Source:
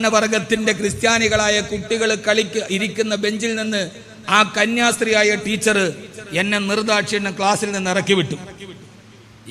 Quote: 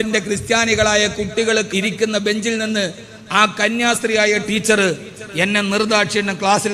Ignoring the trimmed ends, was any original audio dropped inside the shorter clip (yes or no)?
yes